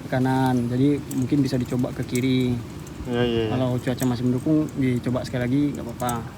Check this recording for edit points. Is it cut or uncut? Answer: uncut